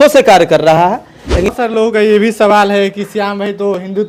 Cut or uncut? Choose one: cut